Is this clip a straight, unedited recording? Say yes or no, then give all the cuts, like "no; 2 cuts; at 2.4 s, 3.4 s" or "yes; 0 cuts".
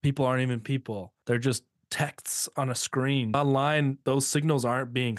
no; 3 cuts; at 1.1 s, 3.3 s, 4.0 s